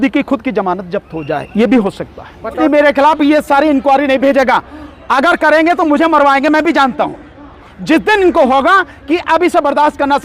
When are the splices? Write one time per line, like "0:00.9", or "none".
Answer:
0:02.6